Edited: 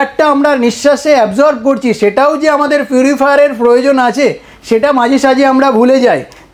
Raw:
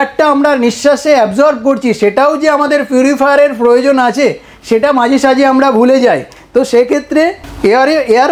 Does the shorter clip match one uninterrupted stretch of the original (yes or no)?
yes